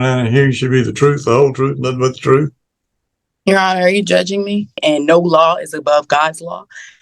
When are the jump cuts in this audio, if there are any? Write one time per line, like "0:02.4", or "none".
0:04.8